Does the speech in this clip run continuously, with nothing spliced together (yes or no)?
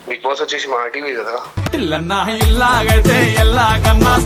yes